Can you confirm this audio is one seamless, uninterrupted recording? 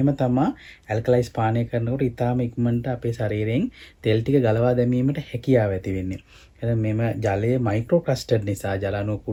yes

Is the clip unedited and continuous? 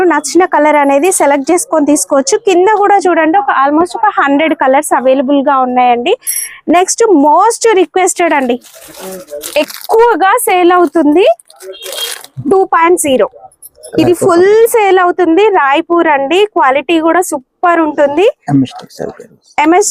yes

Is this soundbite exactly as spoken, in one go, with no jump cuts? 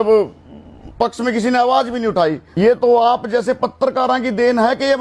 no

